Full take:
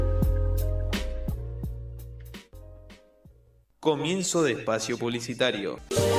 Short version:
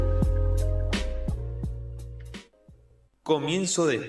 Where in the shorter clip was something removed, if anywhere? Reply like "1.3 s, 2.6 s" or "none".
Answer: 2.5 s